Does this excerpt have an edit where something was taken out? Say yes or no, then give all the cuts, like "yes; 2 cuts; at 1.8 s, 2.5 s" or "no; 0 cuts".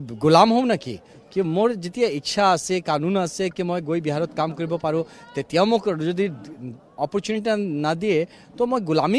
no; 0 cuts